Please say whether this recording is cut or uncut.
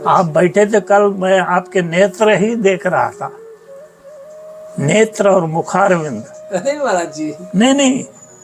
uncut